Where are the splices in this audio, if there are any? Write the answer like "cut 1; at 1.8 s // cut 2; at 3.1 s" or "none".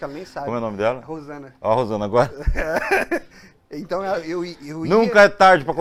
none